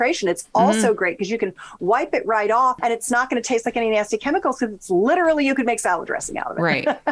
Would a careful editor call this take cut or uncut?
cut